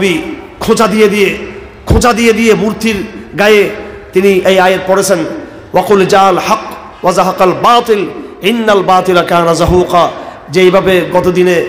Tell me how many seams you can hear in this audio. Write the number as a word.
zero